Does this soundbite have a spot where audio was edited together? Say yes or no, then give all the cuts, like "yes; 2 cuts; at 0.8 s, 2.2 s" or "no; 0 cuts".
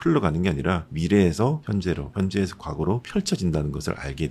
yes; 3 cuts; at 0.9 s, 1.9 s, 3.0 s